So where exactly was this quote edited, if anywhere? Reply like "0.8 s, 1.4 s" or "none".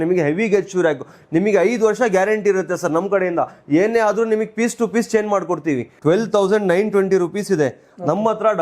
1.2 s, 5.9 s